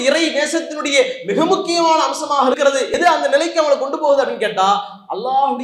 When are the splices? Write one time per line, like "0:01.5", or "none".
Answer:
0:02.9